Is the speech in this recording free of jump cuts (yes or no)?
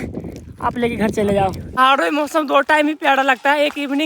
no